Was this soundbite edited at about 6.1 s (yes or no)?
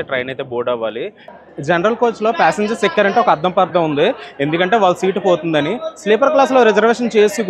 no